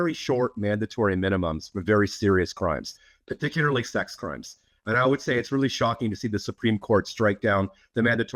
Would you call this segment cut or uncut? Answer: uncut